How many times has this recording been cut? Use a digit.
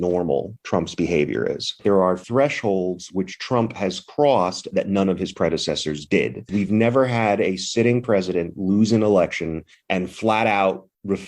2